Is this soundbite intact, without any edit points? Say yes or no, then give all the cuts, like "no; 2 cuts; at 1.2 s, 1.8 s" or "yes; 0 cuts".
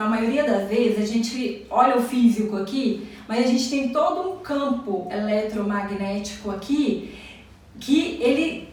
yes; 0 cuts